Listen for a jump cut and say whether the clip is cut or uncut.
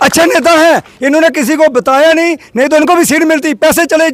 uncut